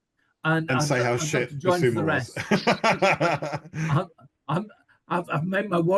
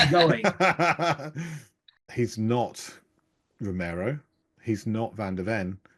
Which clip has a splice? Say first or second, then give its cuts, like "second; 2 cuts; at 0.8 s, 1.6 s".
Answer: second; 1 cut; at 2.1 s